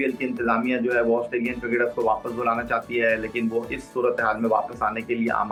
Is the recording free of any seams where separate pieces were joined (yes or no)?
yes